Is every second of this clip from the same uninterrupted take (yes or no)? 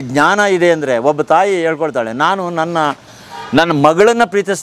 yes